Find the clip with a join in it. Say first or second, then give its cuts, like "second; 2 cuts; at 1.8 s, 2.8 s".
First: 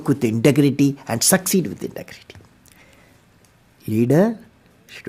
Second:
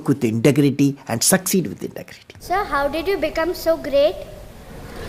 second; 1 cut; at 2.4 s